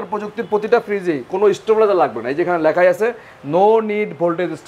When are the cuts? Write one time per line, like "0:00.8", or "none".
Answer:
none